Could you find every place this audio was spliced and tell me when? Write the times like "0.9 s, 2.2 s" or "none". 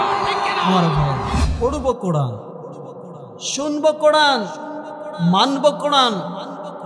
1.4 s